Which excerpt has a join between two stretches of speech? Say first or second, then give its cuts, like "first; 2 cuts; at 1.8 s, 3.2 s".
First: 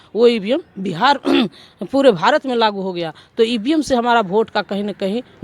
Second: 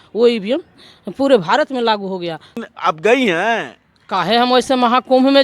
second; 2 cuts; at 0.8 s, 2.5 s